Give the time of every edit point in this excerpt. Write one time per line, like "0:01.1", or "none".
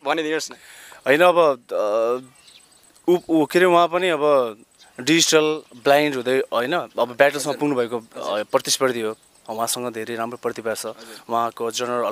none